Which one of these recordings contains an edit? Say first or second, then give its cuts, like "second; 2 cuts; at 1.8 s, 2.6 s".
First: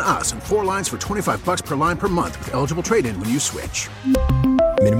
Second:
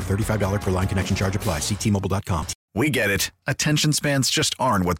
second; 1 cut; at 2.5 s